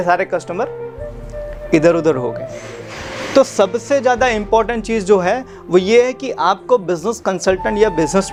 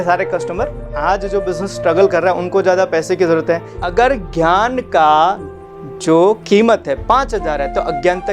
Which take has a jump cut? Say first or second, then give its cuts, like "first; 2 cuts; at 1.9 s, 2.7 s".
second; 2 cuts; at 1.0 s, 3.7 s